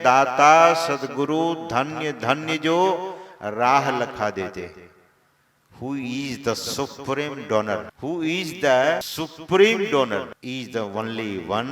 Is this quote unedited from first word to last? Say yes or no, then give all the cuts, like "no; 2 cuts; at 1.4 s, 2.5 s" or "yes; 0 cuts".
no; 3 cuts; at 7.9 s, 9.1 s, 10.3 s